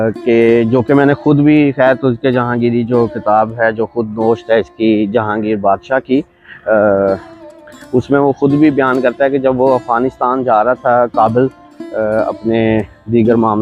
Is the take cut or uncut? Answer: uncut